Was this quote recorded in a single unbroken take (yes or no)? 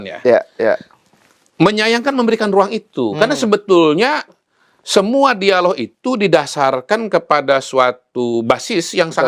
yes